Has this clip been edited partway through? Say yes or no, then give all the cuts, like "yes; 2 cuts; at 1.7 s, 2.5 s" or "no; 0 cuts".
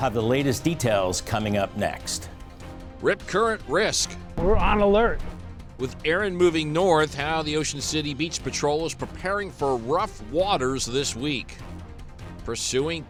no; 0 cuts